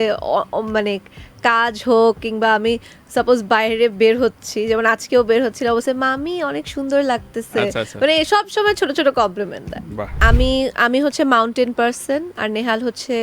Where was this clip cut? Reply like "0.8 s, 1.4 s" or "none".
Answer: 10.1 s